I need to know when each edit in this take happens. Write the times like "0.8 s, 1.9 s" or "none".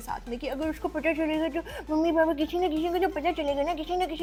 none

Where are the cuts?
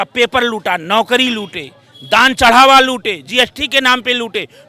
none

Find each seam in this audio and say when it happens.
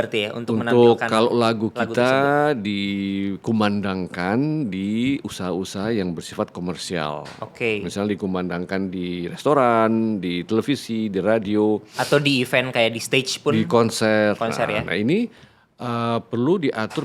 none

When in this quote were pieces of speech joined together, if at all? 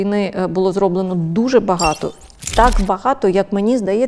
none

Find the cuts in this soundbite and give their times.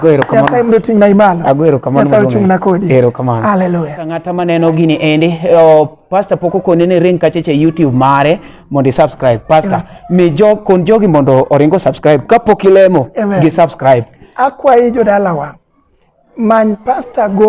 4.2 s

